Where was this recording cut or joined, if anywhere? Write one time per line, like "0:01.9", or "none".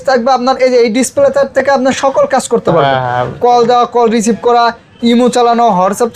none